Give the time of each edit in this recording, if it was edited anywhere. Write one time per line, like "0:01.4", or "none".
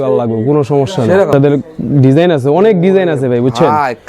0:01.3

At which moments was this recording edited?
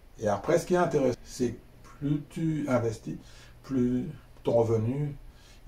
0:01.1

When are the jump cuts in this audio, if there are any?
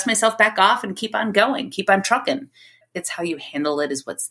0:02.9

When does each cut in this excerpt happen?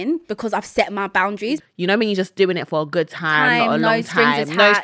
0:01.6

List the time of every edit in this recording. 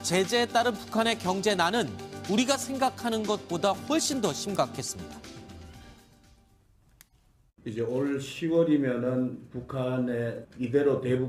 none

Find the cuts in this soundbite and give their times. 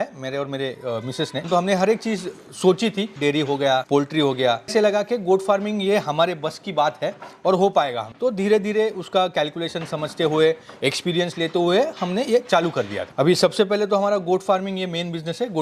0:01.5
0:03.1
0:13.0

